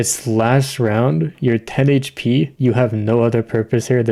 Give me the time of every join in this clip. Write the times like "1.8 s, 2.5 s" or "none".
2.5 s